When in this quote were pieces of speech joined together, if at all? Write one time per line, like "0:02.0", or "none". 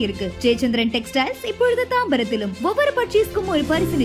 none